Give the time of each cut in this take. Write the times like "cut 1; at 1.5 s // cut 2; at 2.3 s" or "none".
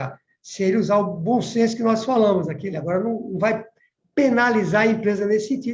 cut 1; at 2.6 s